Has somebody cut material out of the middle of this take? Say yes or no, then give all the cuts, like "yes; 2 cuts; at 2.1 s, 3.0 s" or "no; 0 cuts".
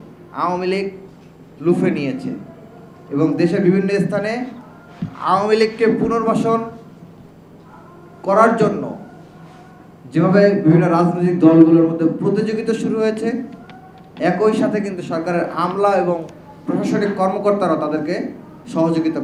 no; 0 cuts